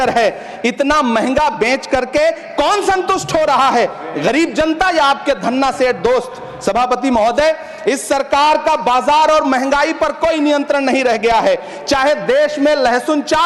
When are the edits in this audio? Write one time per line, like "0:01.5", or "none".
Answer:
none